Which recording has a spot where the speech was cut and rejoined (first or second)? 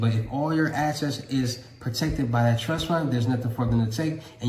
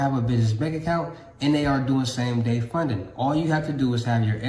second